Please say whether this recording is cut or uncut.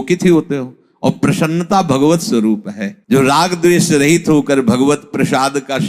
cut